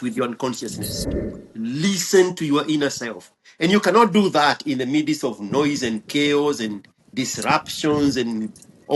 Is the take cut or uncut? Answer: cut